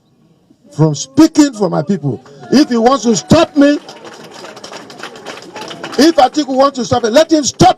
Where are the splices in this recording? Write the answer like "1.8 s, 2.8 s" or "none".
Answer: none